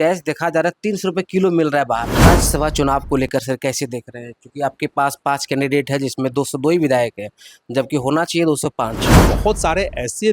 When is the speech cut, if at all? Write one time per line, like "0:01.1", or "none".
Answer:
0:02.3
0:09.2